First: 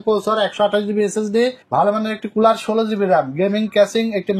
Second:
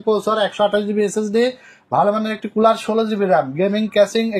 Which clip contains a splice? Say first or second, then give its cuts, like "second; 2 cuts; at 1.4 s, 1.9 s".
first; 1 cut; at 1.6 s